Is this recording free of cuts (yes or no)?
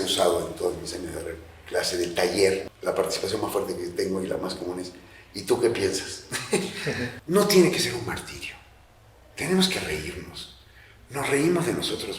no